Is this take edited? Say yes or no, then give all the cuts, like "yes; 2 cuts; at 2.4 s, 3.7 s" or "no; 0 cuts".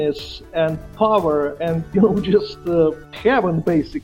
yes; 1 cut; at 3.1 s